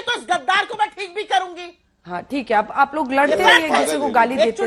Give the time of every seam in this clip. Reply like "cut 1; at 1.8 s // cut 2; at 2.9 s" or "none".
none